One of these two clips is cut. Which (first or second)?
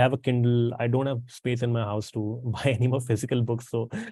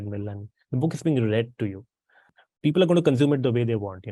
second